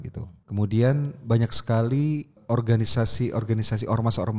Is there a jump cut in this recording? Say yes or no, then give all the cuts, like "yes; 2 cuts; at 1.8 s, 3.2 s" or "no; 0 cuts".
yes; 1 cut; at 2.3 s